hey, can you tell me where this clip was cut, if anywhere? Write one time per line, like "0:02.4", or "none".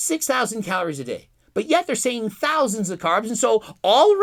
none